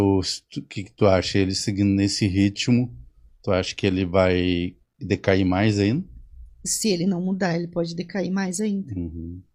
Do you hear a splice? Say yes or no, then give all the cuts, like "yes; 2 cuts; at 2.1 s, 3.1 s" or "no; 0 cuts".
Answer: no; 0 cuts